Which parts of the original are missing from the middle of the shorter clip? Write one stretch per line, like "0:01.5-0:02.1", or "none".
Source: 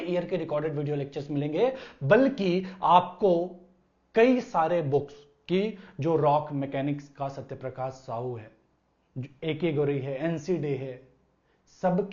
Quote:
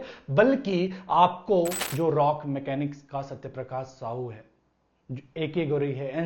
0:03.6-0:05.9